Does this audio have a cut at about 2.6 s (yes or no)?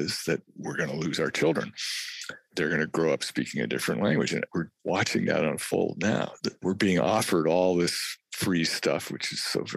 no